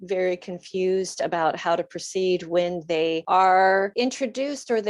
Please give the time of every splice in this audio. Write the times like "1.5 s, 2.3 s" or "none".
3.2 s, 3.9 s